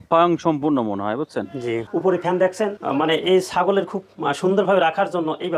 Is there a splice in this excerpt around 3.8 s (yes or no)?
no